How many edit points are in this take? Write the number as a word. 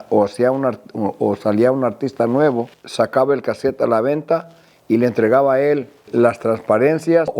two